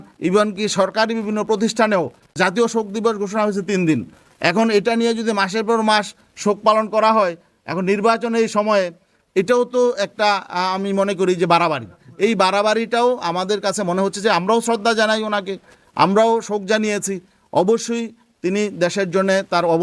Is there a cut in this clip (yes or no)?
yes